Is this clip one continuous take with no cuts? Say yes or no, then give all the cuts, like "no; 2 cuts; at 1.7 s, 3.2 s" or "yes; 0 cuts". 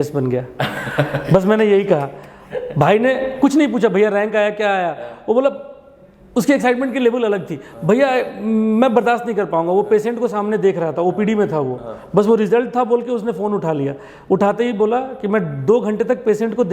yes; 0 cuts